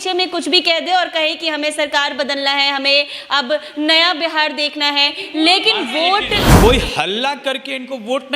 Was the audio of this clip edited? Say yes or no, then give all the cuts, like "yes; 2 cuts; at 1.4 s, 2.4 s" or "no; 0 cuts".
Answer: yes; 1 cut; at 6.5 s